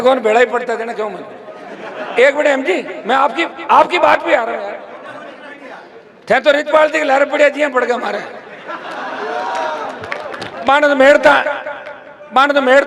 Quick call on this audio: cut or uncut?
uncut